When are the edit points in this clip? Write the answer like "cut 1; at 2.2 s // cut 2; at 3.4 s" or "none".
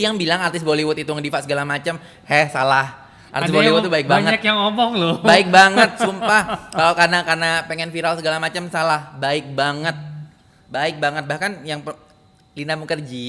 none